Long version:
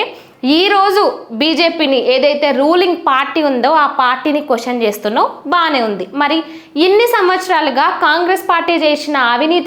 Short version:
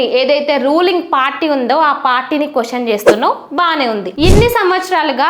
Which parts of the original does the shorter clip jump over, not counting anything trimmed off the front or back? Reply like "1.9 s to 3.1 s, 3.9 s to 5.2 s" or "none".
6.0 s to 6.7 s